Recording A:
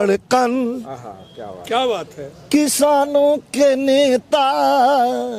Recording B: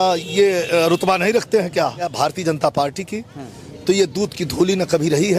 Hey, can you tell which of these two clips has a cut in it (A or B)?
B